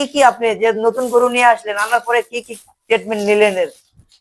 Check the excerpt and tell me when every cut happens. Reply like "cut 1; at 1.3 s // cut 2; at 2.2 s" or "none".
none